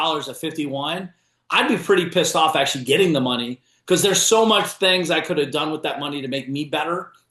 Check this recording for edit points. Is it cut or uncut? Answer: uncut